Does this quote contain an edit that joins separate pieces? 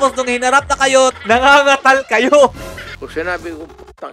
yes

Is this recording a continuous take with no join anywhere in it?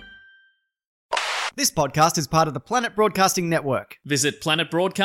no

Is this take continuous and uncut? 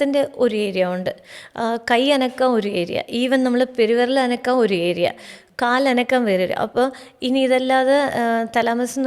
yes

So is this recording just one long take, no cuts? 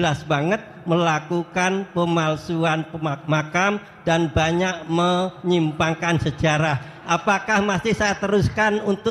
yes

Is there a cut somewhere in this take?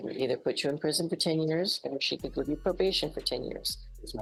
no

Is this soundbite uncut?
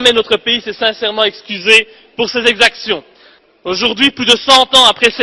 no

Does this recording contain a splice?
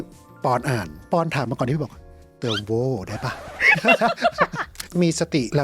yes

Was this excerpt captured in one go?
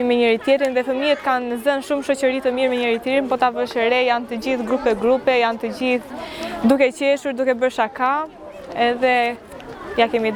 yes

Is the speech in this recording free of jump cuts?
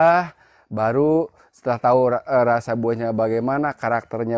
yes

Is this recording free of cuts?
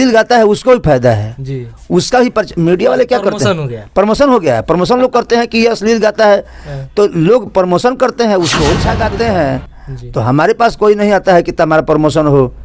no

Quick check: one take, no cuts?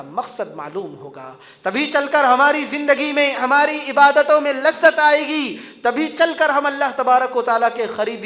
yes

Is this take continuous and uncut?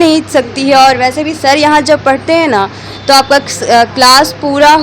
yes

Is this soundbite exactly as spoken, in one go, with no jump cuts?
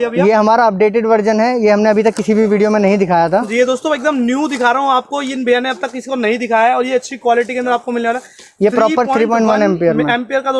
yes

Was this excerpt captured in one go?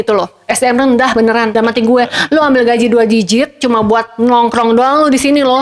yes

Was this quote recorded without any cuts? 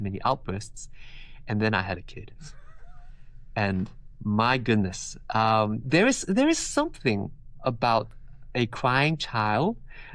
yes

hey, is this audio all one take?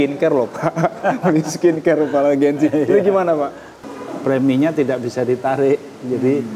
no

